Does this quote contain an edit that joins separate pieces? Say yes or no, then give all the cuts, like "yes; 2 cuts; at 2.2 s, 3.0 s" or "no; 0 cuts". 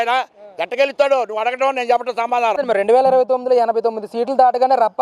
yes; 1 cut; at 2.6 s